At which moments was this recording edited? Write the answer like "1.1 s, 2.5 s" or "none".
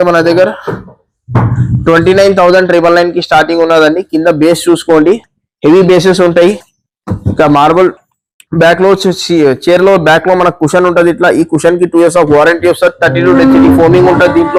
none